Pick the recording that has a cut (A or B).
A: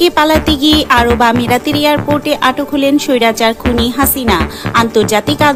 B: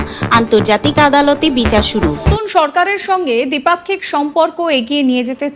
B